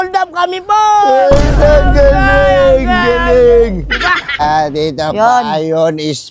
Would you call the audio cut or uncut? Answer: cut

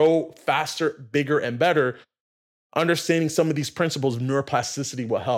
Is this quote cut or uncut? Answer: uncut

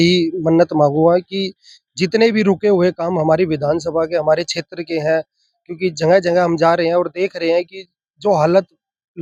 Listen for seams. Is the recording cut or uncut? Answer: uncut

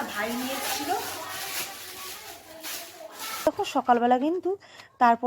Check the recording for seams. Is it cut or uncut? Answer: cut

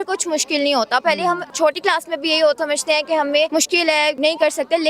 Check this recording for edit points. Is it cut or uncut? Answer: cut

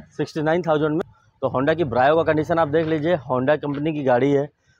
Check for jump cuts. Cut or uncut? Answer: cut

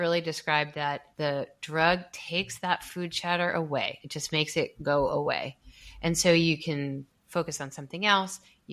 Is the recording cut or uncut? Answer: cut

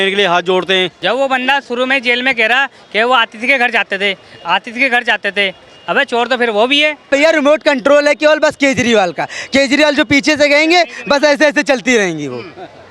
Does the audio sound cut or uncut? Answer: cut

